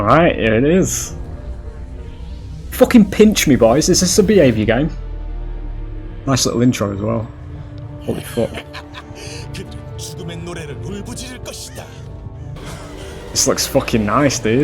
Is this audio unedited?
no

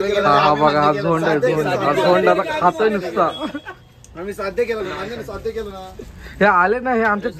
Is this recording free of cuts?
yes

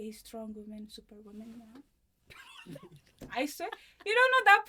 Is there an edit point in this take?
no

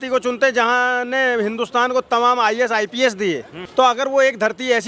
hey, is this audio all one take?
no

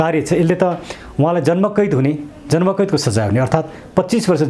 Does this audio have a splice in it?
no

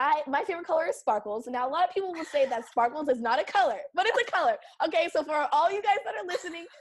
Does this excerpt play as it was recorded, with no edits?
yes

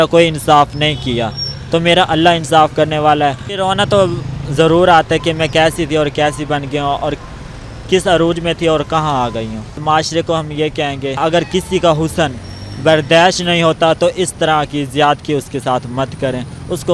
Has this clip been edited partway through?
yes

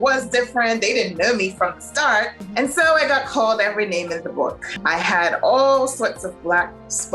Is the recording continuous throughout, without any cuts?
no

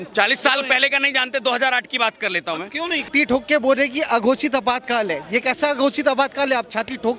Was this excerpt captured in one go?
no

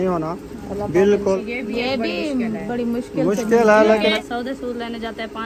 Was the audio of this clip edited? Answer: yes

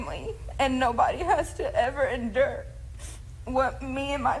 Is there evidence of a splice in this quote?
no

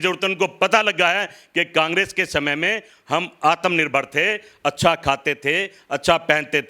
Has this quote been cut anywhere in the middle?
no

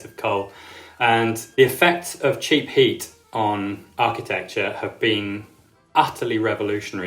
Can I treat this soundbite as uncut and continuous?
no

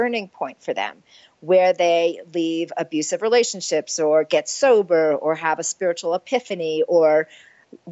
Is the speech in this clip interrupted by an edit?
no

